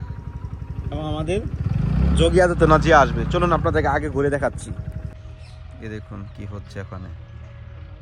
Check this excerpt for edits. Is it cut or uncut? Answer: cut